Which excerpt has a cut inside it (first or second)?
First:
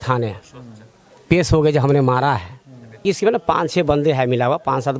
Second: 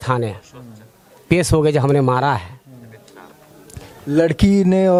first